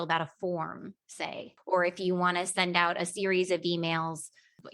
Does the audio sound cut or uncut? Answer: cut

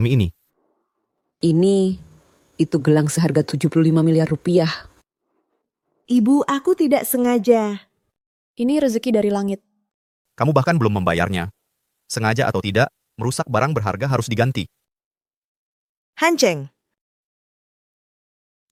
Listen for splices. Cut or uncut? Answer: uncut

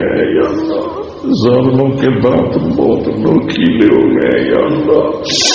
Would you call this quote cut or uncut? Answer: uncut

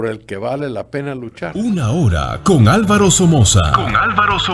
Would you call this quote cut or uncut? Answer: cut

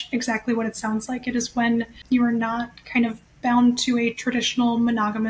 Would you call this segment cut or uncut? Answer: cut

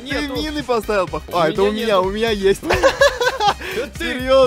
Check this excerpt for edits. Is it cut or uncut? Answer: uncut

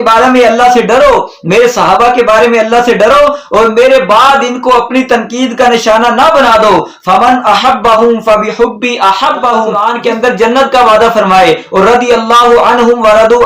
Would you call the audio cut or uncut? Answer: cut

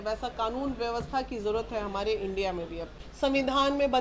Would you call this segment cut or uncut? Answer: cut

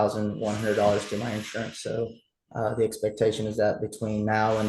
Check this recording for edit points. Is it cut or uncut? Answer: uncut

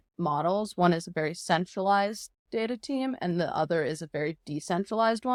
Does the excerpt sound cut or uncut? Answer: uncut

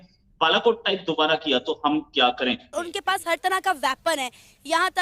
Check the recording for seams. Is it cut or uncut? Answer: cut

